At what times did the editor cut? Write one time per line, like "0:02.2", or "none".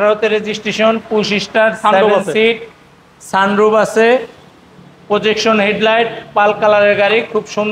none